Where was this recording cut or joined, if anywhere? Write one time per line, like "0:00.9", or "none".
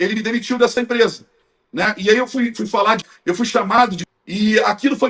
0:03.1
0:04.0

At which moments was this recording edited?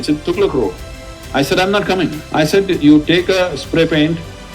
0:02.2

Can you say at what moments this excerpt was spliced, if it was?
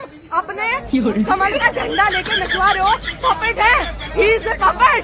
none

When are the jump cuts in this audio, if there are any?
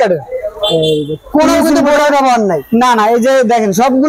none

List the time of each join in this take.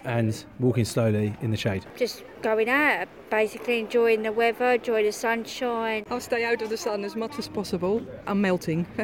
0:02.1
0:06.1
0:08.3

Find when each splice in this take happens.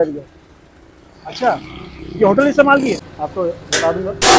0:03.1

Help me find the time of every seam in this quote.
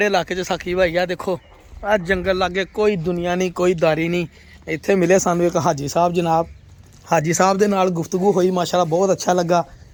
none

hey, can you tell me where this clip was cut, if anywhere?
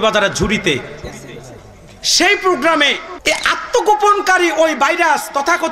0:03.1

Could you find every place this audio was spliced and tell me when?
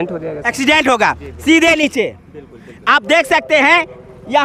none

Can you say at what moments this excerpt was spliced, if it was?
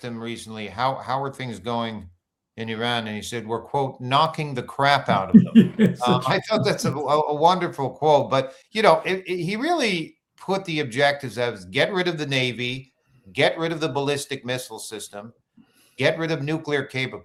none

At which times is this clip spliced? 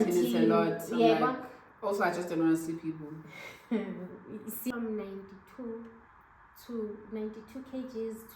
0:04.7

